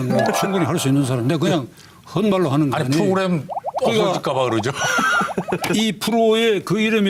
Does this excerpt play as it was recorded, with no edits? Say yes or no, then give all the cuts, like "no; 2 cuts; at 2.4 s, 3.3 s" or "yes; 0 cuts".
yes; 0 cuts